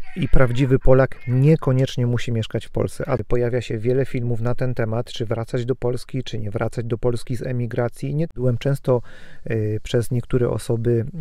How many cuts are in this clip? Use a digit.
2